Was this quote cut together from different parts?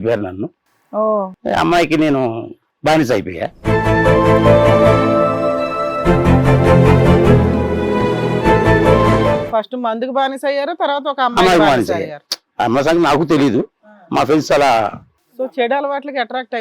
yes; 3 cuts; at 1.3 s, 3.6 s, 9.4 s

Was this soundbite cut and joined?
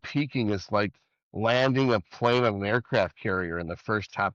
no; 0 cuts

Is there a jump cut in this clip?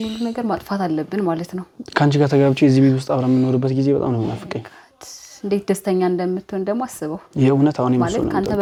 no; 0 cuts

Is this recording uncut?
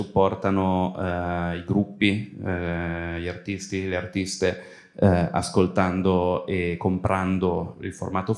yes; 0 cuts

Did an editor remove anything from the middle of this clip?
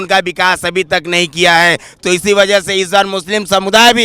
no; 0 cuts

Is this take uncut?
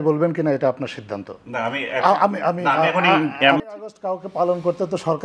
no; 1 cut; at 3.6 s

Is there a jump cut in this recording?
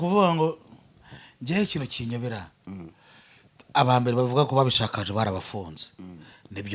no; 0 cuts

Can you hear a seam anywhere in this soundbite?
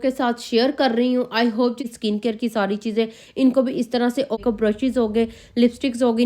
yes; 2 cuts; at 1.8 s, 4.4 s

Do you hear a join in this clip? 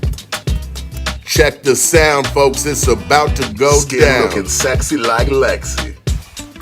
yes; 1 cut; at 1.2 s

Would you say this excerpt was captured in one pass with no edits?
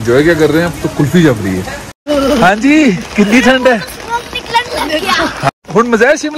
no; 2 cuts; at 2.1 s, 5.5 s

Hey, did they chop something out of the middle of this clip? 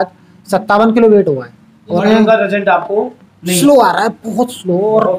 yes; 1 cut; at 2.0 s

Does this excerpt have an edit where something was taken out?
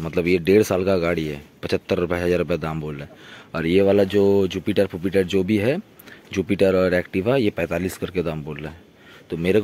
no; 0 cuts

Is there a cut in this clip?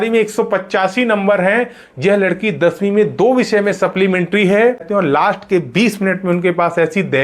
yes; 1 cut; at 4.9 s

